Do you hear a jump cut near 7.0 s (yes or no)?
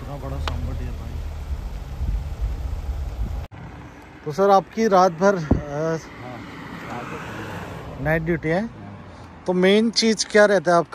no